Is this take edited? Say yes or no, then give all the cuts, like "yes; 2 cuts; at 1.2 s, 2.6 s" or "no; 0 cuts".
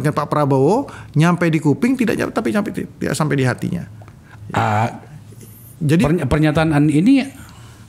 no; 0 cuts